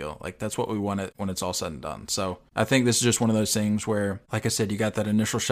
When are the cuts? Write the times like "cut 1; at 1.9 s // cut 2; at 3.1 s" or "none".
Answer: cut 1; at 1.1 s // cut 2; at 2.5 s // cut 3; at 4.3 s